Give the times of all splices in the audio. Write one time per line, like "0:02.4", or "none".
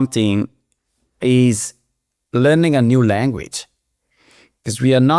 none